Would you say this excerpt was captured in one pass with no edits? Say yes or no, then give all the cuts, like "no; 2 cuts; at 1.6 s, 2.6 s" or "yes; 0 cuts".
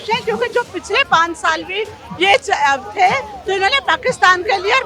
yes; 0 cuts